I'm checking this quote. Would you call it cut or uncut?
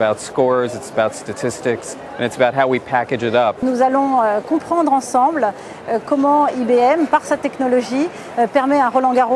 uncut